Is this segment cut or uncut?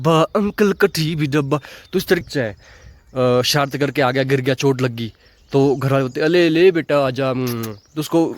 cut